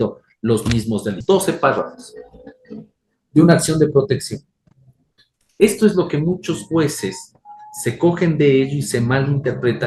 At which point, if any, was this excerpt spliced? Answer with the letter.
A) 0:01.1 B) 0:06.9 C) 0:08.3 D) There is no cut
A